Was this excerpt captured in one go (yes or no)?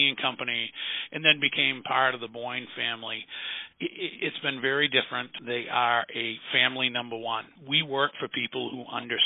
no